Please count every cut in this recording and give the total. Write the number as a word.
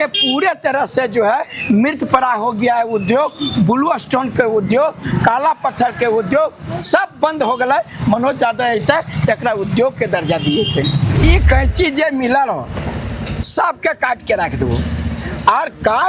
one